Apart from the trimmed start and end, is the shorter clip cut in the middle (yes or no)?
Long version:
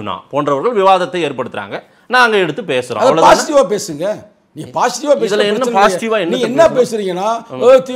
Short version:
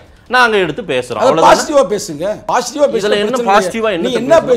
yes